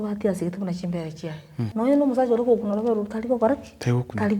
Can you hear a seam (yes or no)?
yes